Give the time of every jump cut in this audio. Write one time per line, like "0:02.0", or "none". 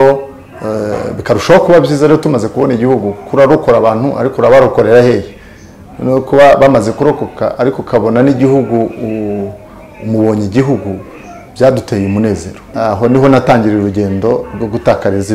0:12.6

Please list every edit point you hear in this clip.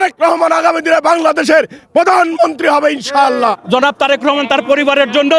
0:03.5

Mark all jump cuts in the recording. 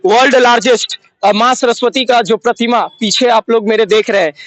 none

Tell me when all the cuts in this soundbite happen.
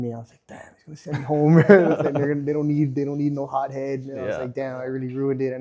none

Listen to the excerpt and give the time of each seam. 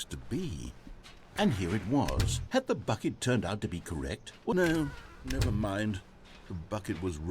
0:01.1
0:04.5

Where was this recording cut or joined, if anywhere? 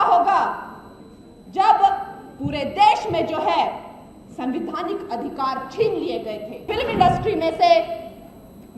0:06.7

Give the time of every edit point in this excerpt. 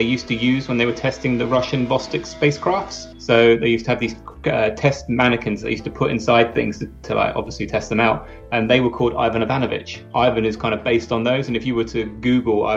0:10.0

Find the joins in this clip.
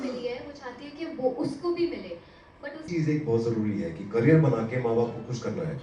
0:02.9

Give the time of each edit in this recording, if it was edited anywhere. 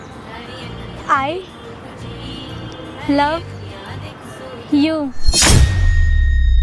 0:05.2

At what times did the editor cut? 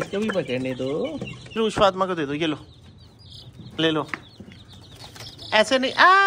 0:01.6

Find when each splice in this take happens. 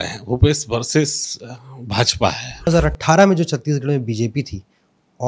0:02.7

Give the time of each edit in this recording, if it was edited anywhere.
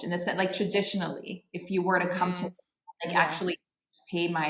none

